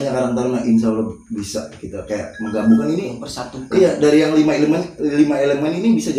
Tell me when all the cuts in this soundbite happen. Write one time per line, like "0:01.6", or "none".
none